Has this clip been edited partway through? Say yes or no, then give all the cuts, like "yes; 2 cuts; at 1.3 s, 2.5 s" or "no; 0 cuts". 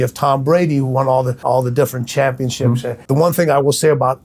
yes; 2 cuts; at 1.4 s, 2.9 s